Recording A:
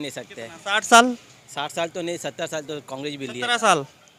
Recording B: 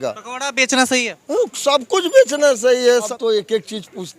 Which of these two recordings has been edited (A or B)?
B